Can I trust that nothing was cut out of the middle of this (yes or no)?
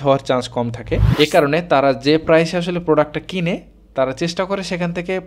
no